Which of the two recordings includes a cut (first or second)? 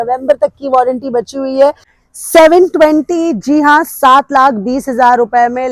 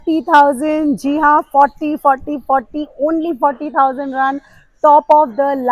first